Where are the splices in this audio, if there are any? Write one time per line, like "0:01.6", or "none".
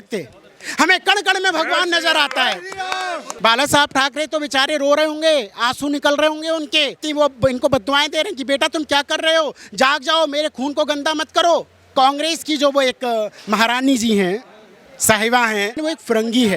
0:03.2
0:07.0
0:11.8
0:15.7

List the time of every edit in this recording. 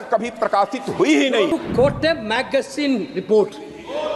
0:01.5

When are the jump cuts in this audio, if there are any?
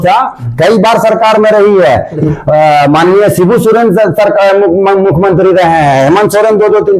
0:02.2

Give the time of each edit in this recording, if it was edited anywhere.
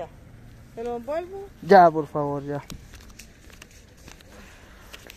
none

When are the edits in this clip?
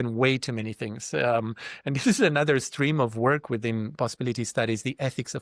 none

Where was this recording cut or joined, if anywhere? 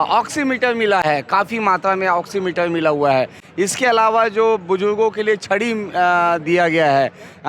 none

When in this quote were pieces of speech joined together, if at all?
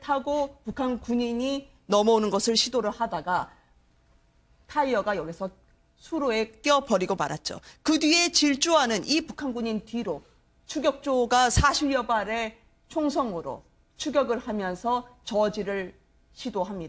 0:08.5

